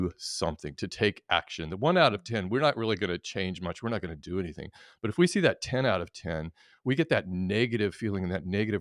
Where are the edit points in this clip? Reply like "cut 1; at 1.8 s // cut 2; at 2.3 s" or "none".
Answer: none